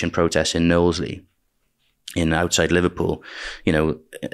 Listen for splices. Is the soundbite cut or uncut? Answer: uncut